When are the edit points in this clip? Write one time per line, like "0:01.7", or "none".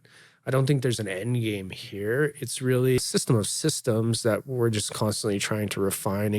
0:03.0